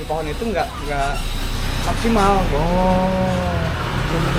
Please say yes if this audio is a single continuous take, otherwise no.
yes